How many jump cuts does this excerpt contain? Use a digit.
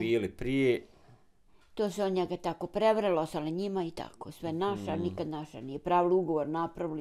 0